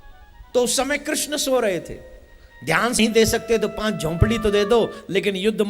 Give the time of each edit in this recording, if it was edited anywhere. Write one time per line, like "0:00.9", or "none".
0:03.0